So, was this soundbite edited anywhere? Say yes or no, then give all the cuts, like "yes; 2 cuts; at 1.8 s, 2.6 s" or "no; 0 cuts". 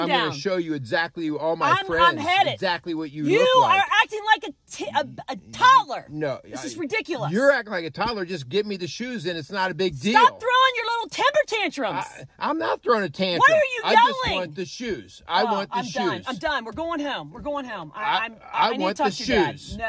no; 0 cuts